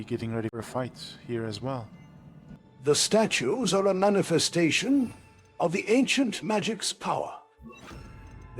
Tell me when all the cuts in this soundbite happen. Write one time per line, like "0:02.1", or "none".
none

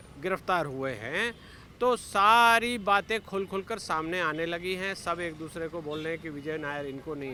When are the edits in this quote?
none

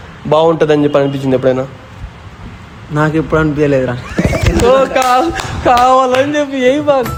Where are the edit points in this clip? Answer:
none

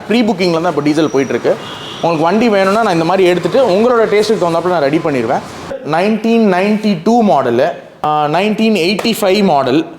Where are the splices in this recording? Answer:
0:05.8
0:08.0

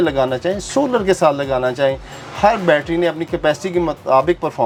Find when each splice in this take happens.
none

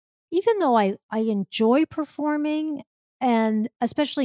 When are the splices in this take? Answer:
0:01.0

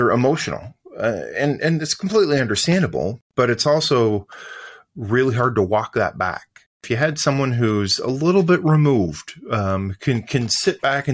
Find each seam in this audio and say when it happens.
0:03.2
0:06.8

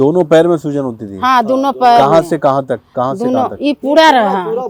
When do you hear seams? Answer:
none

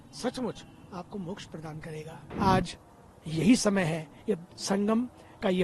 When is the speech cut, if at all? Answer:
0:02.2

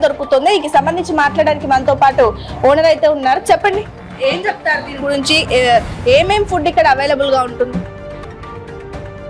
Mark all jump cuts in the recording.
none

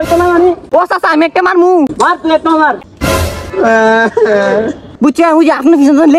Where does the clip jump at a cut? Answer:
0:01.9
0:04.9

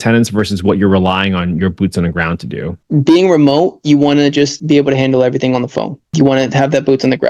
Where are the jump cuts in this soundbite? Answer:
0:02.8
0:04.6

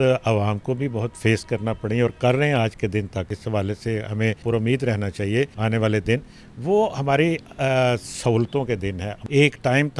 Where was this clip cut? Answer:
0:03.4
0:04.4
0:05.6
0:09.1

